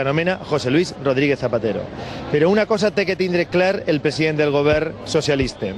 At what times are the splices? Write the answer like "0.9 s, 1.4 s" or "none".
none